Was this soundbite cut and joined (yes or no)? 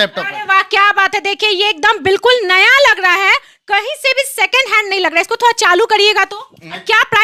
no